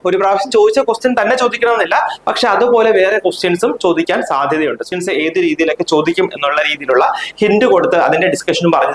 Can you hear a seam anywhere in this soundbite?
yes; 1 cut; at 4.9 s

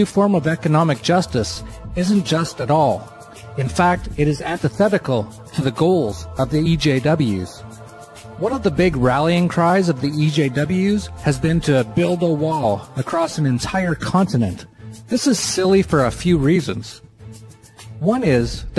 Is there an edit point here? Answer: no; 0 cuts

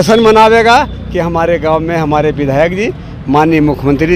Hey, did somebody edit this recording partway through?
no; 0 cuts

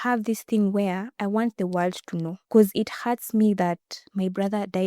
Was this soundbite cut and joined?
yes; 1 cut; at 2.4 s

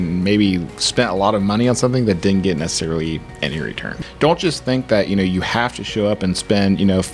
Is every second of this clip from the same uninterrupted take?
no; 1 cut; at 3.9 s

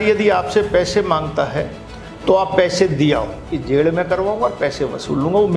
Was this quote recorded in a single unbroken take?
no; 1 cut; at 3.6 s

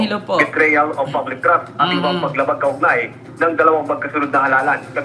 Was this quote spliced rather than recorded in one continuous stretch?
yes; 1 cut; at 2.0 s

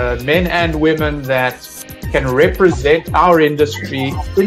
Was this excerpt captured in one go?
yes; 0 cuts

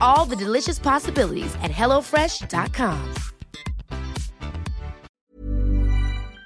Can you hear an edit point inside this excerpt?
yes; 1 cut; at 5.1 s

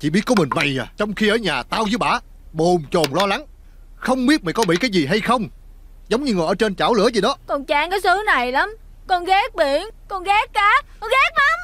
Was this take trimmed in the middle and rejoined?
yes; 1 cut; at 7.4 s

